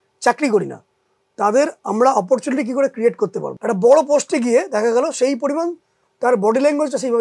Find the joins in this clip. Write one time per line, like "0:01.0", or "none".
0:03.5